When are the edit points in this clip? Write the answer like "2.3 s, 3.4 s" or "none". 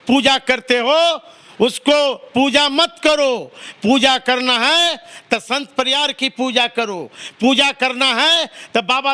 none